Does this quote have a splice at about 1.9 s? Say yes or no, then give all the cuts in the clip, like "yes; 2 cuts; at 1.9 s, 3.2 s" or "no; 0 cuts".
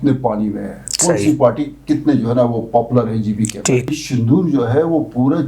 no; 1 cut; at 3.9 s